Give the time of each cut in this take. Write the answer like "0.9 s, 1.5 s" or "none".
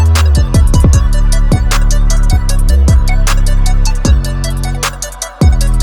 none